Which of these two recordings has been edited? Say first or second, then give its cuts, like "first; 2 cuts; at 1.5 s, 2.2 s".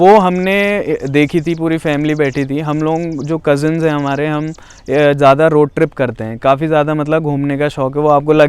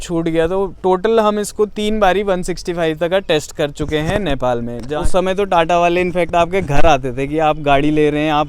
second; 1 cut; at 5.0 s